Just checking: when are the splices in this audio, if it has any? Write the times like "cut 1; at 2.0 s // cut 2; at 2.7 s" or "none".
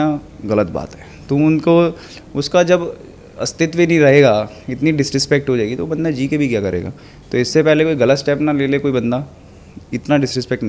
none

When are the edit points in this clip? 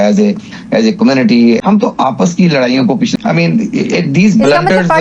cut 1; at 1.6 s // cut 2; at 3.1 s

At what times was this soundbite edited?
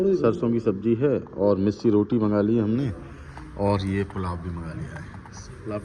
none

